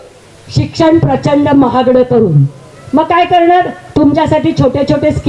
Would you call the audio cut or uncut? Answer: uncut